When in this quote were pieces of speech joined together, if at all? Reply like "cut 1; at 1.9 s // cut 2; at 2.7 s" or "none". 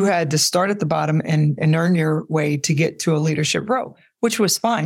none